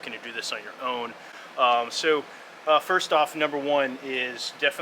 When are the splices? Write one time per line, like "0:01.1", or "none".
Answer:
none